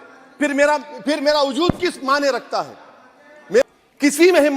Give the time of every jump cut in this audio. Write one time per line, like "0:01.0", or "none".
0:03.6